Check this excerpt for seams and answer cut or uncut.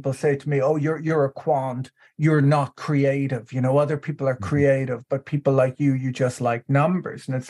uncut